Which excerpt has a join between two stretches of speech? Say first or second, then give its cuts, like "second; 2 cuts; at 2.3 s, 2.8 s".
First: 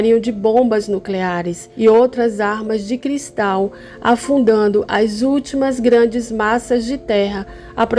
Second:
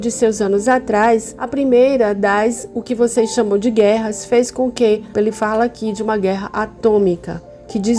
second; 1 cut; at 5.1 s